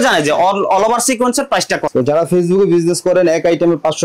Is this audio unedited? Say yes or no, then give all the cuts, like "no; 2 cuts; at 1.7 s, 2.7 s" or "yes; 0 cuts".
no; 1 cut; at 1.9 s